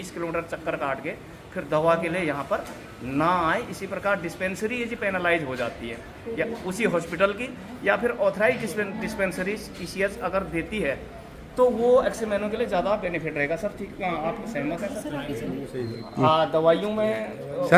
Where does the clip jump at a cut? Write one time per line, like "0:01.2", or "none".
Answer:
none